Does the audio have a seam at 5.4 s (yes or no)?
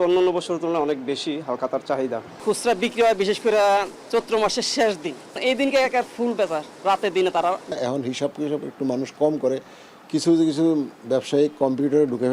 yes